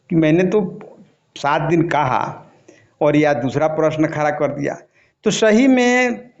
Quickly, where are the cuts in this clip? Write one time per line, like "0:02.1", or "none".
none